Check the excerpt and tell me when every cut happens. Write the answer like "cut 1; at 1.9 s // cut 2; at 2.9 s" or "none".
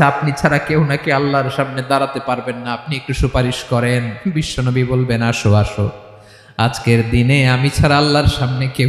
none